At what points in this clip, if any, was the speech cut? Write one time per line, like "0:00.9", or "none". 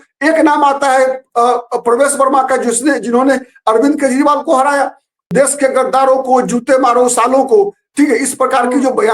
0:05.3